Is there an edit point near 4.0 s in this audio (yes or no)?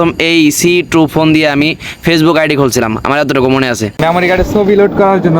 yes